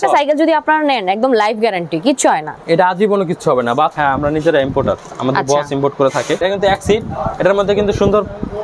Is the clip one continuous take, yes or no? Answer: no